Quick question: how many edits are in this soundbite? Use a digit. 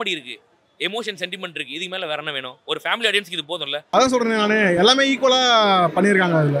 1